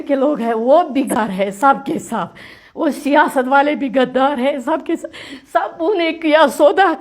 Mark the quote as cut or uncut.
cut